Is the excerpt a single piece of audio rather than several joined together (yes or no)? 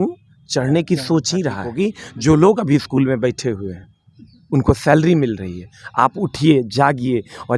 no